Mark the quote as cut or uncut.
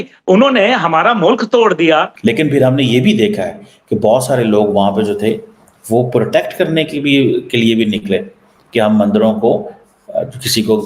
cut